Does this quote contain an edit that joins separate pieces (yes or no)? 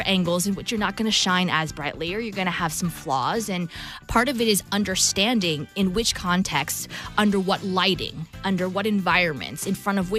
no